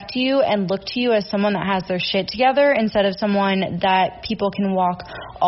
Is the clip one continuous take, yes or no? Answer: yes